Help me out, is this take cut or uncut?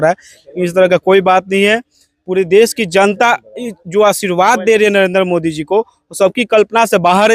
uncut